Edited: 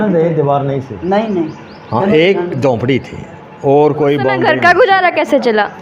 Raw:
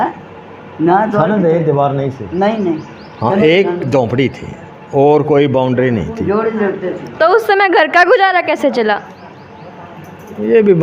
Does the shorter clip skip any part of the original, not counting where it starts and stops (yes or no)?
yes